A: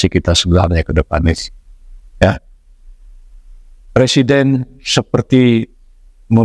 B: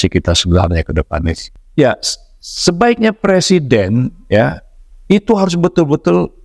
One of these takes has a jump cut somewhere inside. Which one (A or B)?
B